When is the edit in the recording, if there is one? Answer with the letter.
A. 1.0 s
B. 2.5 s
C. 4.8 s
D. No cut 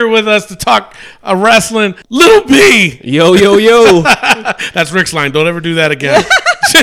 D